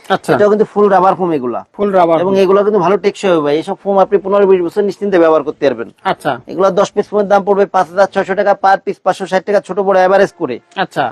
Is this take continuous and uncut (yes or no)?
yes